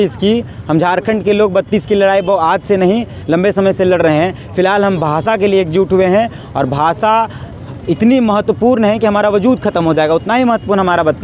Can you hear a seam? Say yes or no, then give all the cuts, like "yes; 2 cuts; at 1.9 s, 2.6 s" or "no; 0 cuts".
no; 0 cuts